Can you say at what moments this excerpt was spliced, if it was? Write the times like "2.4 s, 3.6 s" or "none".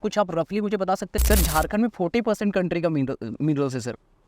1.1 s